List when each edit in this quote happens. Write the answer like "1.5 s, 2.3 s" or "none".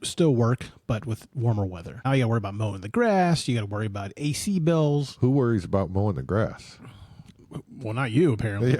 2.0 s